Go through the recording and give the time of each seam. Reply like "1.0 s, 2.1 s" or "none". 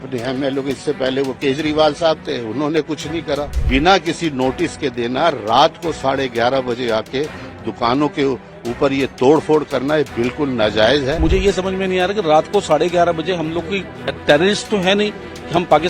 3.6 s, 11.2 s

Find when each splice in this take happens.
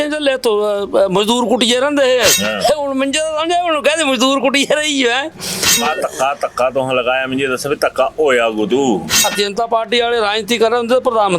2.5 s, 5.8 s, 9.3 s

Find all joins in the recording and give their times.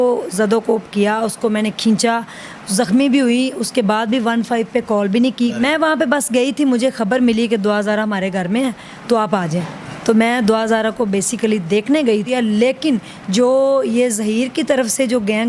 5.5 s, 12.3 s

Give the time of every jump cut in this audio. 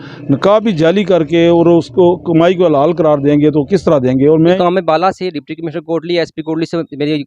4.6 s

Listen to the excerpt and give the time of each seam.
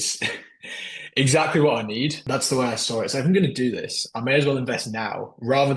2.2 s

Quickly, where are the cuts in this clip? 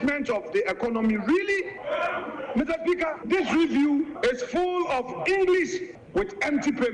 1.8 s, 3.2 s, 4.1 s, 5.9 s

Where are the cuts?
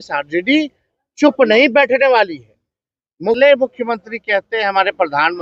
3.4 s

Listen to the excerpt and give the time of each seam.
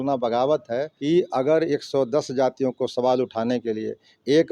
0.9 s

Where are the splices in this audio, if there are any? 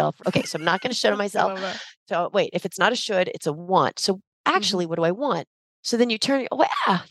none

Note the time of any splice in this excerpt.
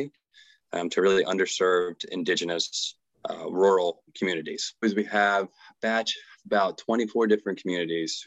4.8 s

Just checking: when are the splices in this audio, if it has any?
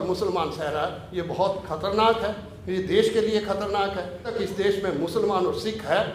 4.3 s

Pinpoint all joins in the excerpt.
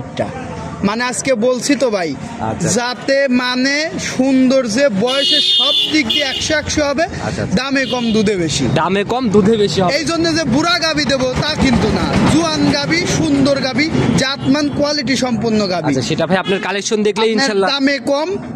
none

